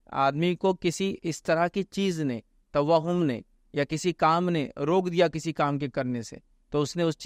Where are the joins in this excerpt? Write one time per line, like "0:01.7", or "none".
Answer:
none